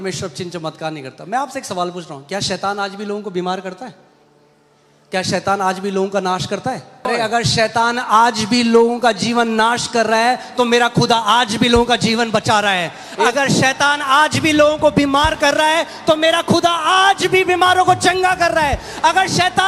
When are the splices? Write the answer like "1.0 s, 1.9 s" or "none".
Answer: 7.1 s